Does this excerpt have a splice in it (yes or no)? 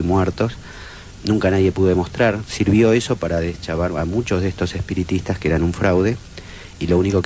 no